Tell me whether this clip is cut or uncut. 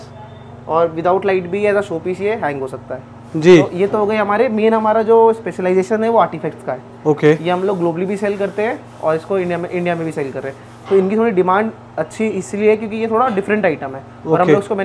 uncut